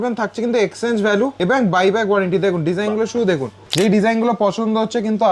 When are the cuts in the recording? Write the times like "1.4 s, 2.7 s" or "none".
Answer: 1.4 s, 3.6 s

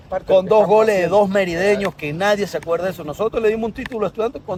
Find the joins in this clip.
none

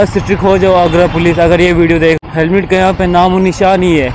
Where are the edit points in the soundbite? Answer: 2.2 s

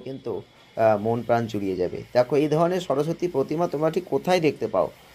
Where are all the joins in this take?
none

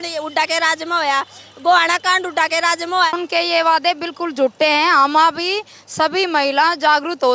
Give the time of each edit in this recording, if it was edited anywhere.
3.1 s

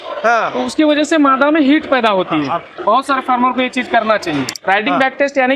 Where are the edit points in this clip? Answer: 2.8 s, 4.5 s

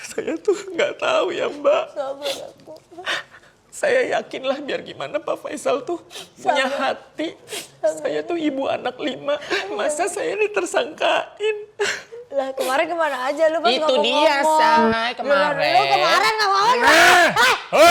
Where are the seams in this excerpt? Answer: none

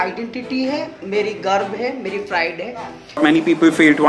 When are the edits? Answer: 3.2 s

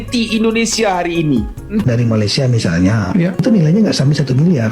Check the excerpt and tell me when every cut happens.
1.9 s

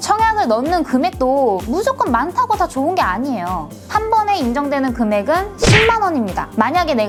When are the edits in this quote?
none

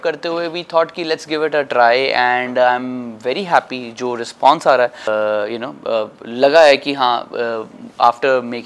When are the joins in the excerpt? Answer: 5.1 s

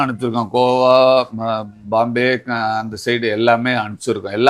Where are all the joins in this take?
none

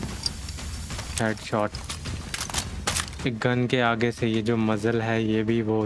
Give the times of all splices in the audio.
none

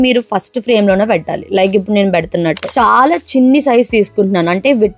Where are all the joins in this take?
2.7 s

